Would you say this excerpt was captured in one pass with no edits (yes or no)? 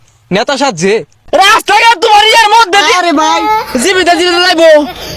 no